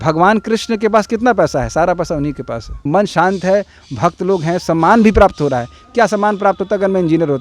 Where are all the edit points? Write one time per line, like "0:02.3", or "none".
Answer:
0:02.9